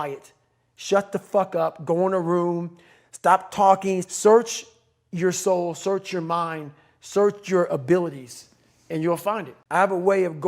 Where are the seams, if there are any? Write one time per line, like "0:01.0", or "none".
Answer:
0:09.6